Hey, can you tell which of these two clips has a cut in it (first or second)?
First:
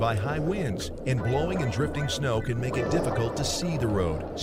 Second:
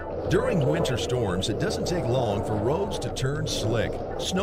second